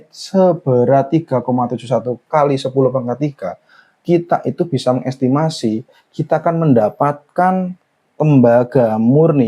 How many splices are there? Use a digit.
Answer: 1